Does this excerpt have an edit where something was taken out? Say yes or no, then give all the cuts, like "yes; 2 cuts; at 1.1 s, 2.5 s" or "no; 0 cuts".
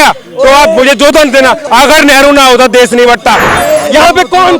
yes; 2 cuts; at 1.6 s, 3.5 s